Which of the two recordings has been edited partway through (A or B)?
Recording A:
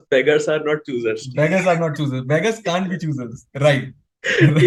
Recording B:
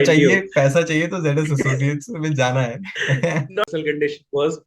B